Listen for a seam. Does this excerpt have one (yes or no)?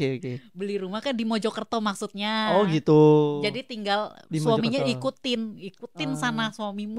no